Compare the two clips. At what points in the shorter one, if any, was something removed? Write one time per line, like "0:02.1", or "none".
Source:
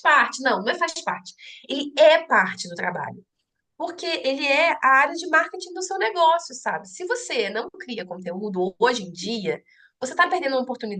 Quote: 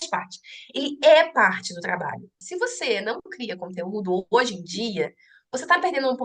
0:02.4